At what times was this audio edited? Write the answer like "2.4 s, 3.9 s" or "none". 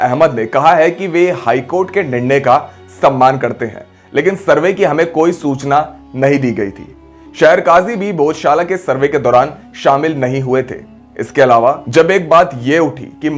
none